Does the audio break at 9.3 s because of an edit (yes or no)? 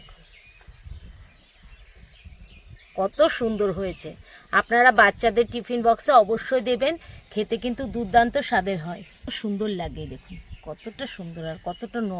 yes